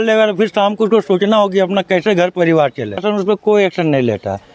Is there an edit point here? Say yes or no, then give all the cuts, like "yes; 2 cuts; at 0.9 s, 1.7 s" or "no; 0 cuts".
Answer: yes; 1 cut; at 3.0 s